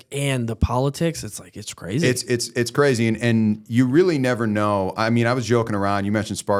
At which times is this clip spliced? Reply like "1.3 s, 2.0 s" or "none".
none

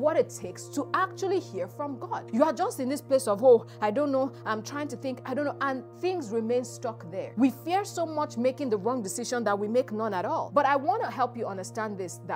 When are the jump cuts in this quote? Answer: 2.2 s, 7.3 s, 10.5 s

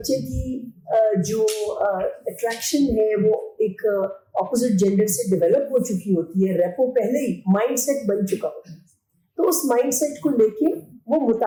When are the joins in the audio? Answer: none

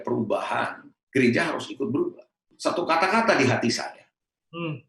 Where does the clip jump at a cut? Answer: 2.5 s

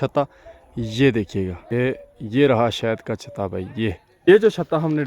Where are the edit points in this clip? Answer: 1.7 s, 4.3 s

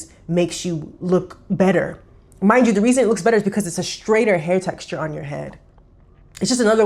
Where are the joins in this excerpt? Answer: none

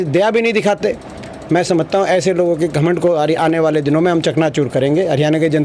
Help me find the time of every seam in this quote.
none

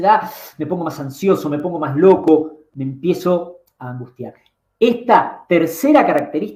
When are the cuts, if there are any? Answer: none

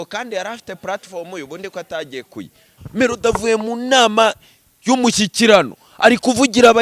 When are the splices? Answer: 2.7 s

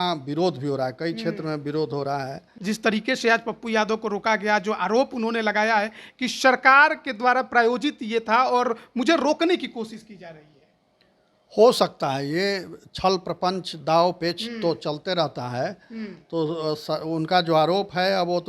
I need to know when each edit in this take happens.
2.5 s

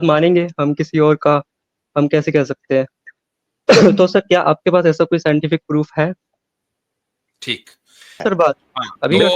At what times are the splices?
8.2 s

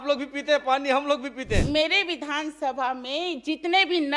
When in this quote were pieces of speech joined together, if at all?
1.6 s

